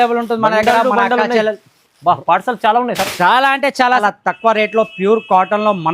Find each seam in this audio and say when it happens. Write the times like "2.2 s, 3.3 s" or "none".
4.0 s